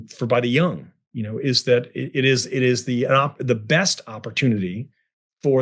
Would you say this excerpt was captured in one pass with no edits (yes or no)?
yes